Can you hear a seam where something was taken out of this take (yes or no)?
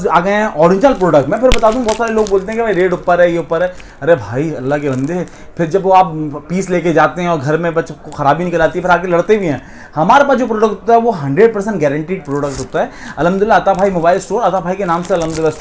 no